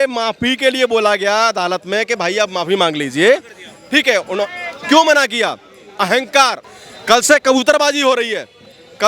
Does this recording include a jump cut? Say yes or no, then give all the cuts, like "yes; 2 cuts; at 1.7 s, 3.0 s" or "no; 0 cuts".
yes; 1 cut; at 6.6 s